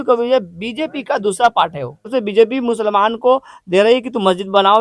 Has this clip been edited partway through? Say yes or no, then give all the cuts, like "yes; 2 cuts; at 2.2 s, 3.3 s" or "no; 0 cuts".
yes; 1 cut; at 2.1 s